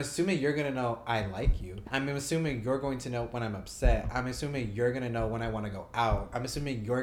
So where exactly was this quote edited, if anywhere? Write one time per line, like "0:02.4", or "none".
0:01.8